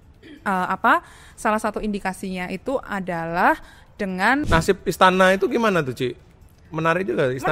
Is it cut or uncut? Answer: cut